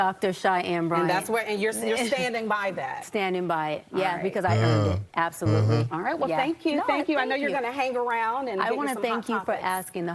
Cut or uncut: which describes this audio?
cut